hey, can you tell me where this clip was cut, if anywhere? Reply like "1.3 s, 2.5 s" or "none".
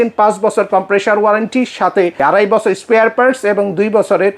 2.2 s